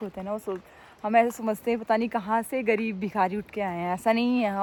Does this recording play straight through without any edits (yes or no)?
yes